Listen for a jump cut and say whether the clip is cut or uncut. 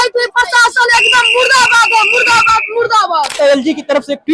cut